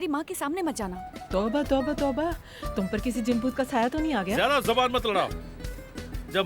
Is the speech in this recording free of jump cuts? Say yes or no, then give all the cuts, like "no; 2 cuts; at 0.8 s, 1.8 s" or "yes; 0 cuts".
no; 1 cut; at 1.0 s